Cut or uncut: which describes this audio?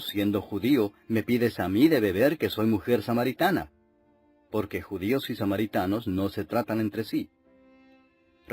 cut